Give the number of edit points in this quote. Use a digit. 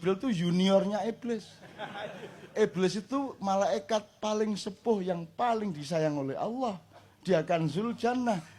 0